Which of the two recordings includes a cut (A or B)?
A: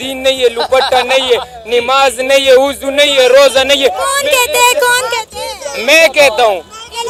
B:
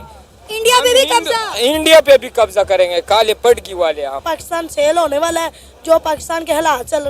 B